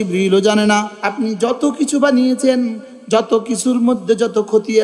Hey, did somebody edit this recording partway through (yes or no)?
yes